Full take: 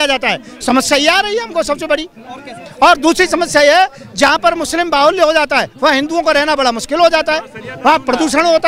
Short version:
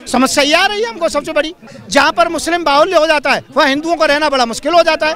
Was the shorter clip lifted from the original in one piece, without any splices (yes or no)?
no